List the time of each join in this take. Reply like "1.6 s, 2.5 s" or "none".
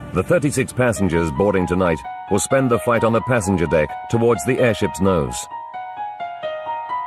4.2 s